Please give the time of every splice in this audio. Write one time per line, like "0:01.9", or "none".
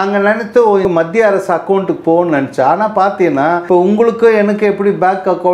0:00.8
0:03.6